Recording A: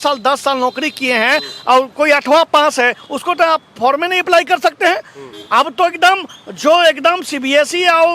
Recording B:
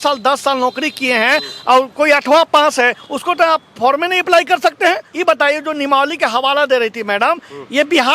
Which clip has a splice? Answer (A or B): B